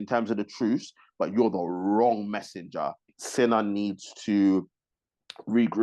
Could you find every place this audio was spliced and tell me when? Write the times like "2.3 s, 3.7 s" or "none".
3.2 s